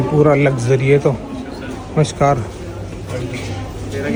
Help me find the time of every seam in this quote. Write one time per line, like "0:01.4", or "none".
none